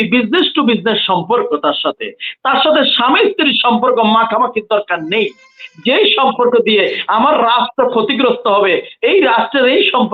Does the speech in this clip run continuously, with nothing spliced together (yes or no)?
yes